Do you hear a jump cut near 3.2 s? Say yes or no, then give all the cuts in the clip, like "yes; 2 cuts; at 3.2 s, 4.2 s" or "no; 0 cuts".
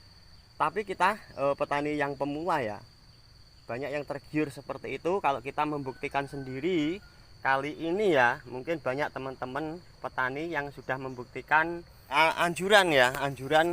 no; 1 cut; at 11.9 s